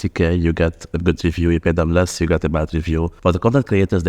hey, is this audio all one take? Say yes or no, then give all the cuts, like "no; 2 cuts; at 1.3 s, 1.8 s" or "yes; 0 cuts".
no; 1 cut; at 3.1 s